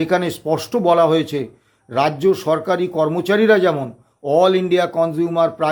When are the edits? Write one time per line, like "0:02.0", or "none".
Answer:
none